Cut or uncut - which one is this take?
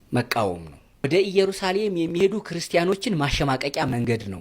cut